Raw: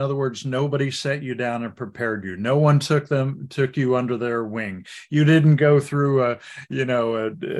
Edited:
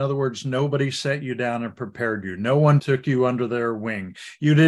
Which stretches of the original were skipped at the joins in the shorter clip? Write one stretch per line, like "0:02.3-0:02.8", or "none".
0:02.8-0:03.5